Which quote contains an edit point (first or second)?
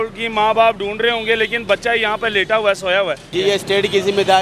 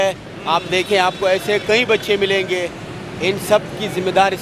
first